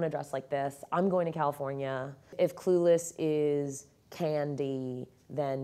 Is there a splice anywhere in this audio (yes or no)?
yes